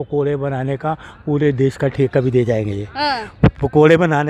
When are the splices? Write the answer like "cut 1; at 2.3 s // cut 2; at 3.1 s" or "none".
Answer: none